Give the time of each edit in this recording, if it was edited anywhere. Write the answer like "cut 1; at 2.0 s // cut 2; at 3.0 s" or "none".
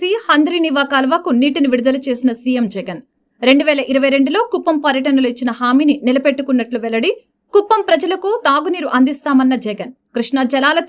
none

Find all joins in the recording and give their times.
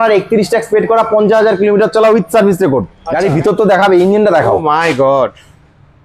cut 1; at 3.0 s

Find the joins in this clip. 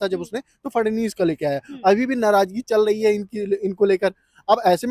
none

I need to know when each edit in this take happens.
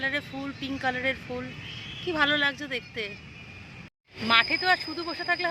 cut 1; at 3.9 s

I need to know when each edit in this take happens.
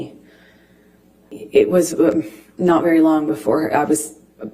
cut 1; at 1.2 s

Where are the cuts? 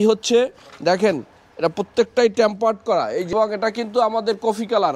cut 1; at 3.3 s

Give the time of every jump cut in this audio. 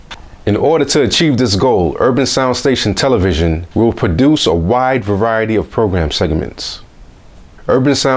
none

